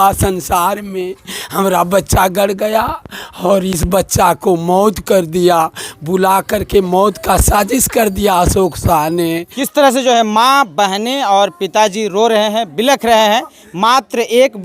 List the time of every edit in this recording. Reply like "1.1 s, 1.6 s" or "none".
9.4 s